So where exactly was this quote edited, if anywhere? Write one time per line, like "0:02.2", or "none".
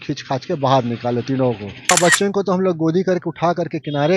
0:01.9

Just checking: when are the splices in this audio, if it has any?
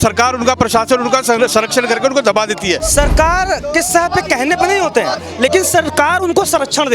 0:02.8

